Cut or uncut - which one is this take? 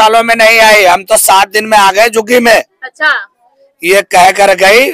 uncut